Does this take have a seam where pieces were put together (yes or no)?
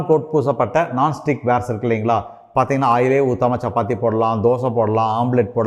no